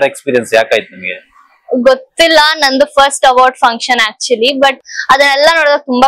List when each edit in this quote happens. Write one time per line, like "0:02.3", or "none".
0:04.8